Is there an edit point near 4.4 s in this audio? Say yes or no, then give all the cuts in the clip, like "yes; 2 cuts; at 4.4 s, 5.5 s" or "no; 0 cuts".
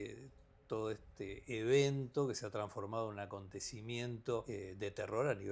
yes; 1 cut; at 4.4 s